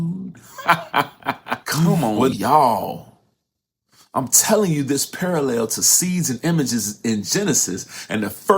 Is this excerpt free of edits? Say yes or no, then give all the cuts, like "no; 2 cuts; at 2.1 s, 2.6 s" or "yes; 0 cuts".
no; 1 cut; at 1.9 s